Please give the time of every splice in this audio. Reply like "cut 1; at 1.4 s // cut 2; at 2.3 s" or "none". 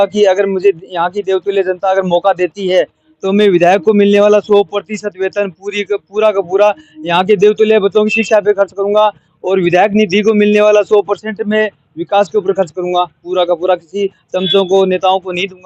none